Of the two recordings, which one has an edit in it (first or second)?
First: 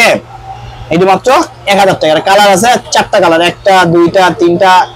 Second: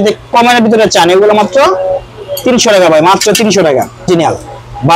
second